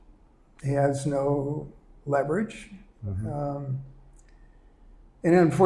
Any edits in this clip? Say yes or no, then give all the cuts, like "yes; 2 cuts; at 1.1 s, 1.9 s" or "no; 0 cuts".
no; 0 cuts